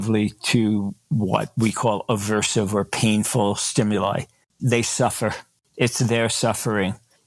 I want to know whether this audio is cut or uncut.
uncut